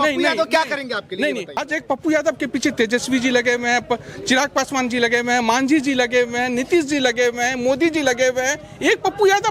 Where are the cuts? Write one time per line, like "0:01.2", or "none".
0:01.6